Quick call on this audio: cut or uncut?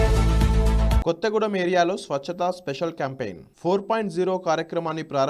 cut